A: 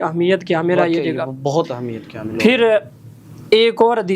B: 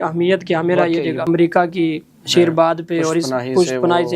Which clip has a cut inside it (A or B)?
B